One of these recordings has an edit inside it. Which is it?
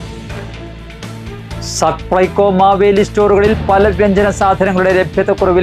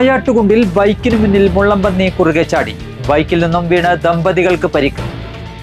first; 1 cut; at 1.1 s

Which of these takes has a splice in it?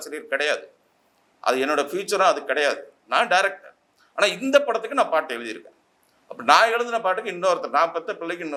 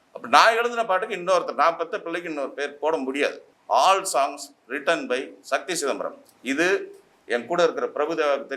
second; 1 cut; at 3.5 s

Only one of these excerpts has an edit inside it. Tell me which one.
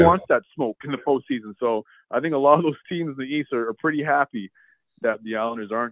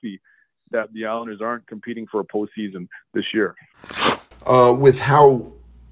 second; 1 cut; at 3.9 s

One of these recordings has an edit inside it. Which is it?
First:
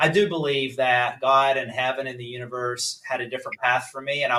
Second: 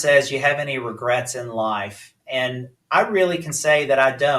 second; 1 cut; at 2.7 s

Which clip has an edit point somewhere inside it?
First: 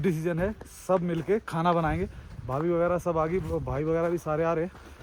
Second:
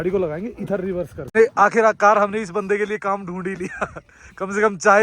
second; 1 cut; at 1.2 s

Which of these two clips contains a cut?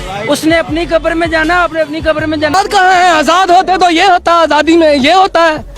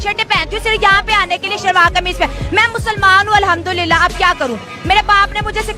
first; 1 cut; at 2.5 s

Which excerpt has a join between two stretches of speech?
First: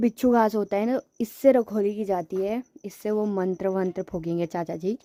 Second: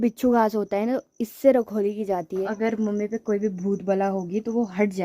second; 1 cut; at 2.5 s

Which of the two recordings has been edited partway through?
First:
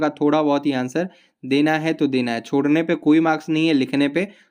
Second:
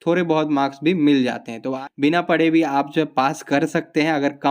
second; 1 cut; at 1.7 s

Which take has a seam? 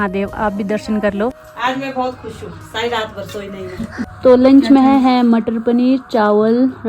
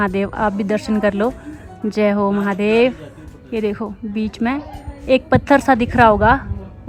first; 2 cuts; at 1.5 s, 4.1 s

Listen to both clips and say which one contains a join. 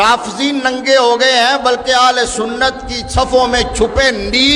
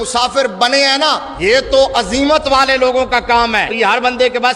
second; 2 cuts; at 1.3 s, 3.7 s

